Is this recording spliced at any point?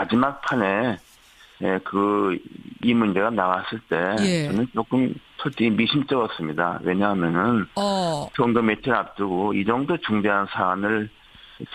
no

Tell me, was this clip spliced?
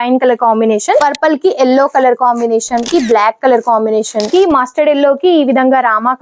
yes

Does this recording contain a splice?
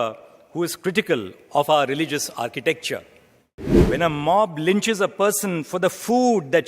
yes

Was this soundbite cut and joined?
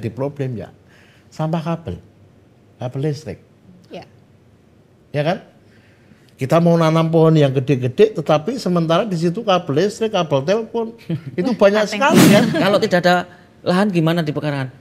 yes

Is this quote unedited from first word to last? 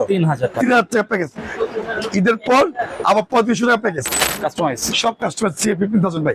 no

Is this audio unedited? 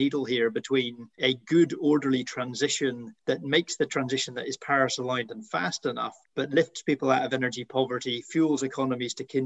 no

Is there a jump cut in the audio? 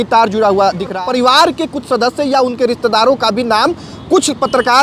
yes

